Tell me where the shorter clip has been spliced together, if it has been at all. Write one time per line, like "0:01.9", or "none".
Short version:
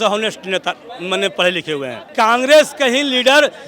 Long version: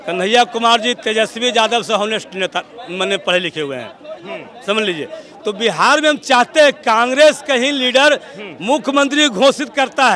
0:02.1